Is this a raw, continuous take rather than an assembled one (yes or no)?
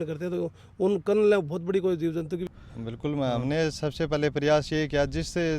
no